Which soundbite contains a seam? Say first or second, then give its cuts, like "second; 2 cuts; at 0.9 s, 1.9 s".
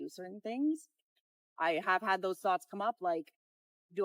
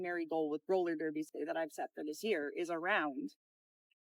second; 1 cut; at 1.3 s